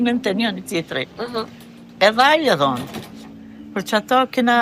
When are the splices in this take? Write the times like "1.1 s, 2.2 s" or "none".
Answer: none